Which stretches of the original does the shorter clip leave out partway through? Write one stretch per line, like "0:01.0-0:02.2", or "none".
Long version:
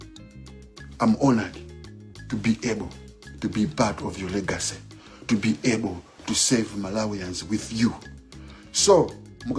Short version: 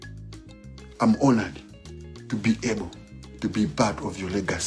none